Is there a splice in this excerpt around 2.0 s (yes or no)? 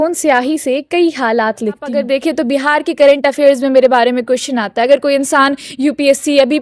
yes